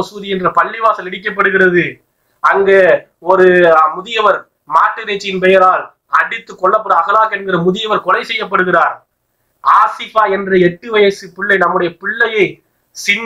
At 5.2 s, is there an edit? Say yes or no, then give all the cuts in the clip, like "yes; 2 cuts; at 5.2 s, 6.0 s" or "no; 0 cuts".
no; 0 cuts